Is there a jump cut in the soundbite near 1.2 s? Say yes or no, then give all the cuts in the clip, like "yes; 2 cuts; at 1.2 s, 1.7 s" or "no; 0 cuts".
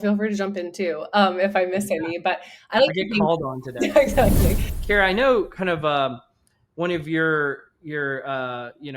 no; 1 cut; at 4.7 s